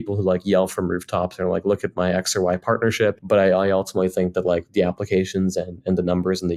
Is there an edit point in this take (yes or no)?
yes